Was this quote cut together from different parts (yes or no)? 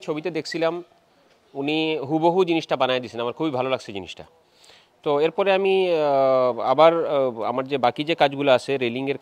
no